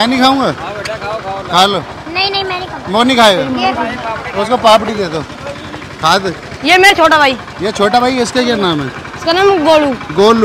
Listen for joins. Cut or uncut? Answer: uncut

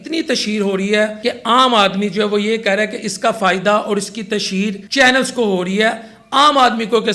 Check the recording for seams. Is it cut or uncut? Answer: cut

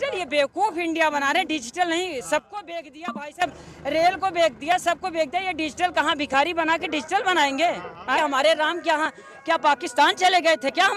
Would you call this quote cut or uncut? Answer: cut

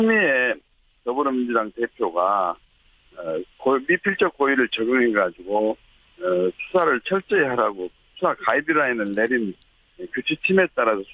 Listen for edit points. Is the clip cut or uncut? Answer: cut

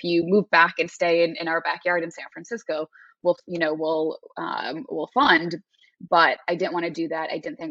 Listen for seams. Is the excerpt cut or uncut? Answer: uncut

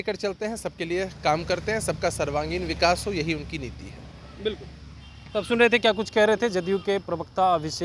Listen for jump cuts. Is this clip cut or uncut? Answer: uncut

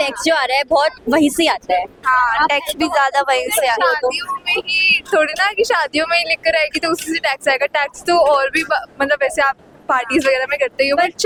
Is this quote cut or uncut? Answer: uncut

